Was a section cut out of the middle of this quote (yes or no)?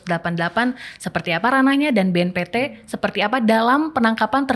no